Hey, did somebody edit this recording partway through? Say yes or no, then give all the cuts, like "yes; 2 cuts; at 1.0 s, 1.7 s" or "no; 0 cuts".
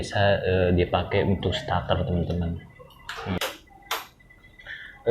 yes; 1 cut; at 3.4 s